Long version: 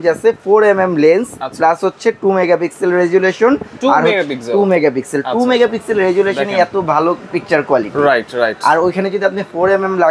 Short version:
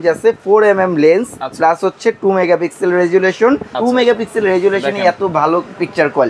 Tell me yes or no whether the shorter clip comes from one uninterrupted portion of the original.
no